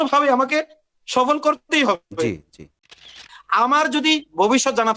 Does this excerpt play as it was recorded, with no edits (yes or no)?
no